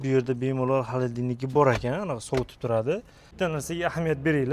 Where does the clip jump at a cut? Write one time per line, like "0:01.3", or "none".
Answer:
0:03.3